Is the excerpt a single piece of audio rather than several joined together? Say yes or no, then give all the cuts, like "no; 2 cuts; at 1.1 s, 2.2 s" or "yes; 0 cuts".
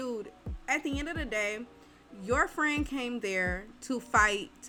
yes; 0 cuts